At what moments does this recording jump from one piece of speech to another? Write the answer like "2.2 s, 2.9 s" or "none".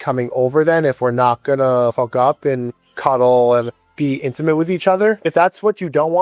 1.9 s, 2.7 s, 3.7 s, 5.2 s